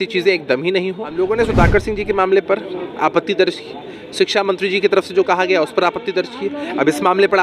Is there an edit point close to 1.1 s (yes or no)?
yes